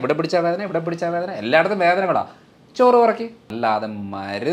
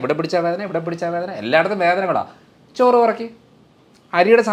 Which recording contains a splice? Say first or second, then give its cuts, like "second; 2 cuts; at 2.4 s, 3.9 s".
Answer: first; 1 cut; at 3.4 s